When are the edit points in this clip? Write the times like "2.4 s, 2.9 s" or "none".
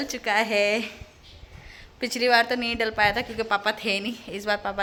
none